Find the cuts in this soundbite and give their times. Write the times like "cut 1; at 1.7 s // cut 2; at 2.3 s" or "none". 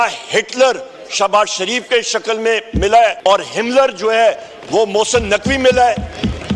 cut 1; at 3.2 s

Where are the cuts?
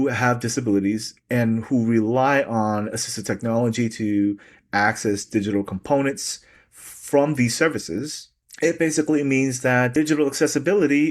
none

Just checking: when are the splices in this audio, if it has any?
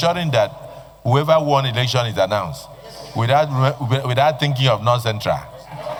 none

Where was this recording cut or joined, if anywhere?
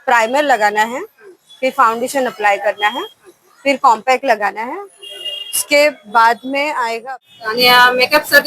cut 1; at 7.0 s

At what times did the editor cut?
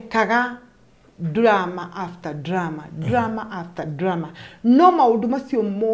none

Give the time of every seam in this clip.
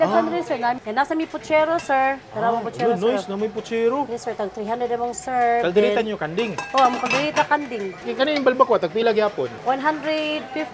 cut 1; at 0.8 s // cut 2; at 2.3 s // cut 3; at 8.0 s // cut 4; at 9.6 s

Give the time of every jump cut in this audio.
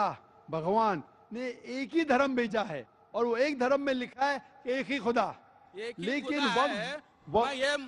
cut 1; at 1.1 s

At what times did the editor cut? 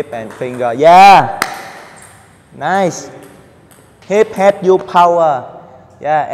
cut 1; at 0.9 s

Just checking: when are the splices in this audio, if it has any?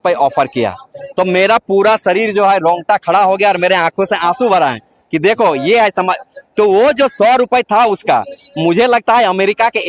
none

